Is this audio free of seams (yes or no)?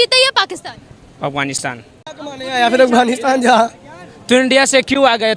no